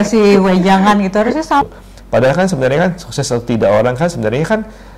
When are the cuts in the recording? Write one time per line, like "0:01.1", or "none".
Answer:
0:01.6